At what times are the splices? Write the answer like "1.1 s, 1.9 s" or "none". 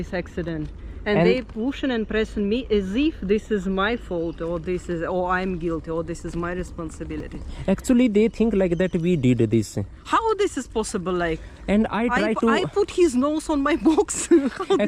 none